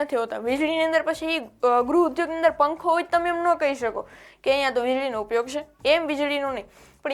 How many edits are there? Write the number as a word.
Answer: one